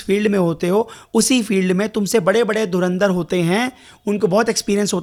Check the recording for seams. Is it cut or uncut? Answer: uncut